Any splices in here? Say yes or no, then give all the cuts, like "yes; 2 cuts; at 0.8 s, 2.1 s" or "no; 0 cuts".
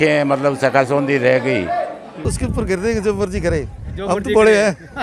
yes; 1 cut; at 2.3 s